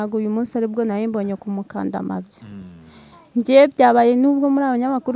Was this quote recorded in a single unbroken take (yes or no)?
yes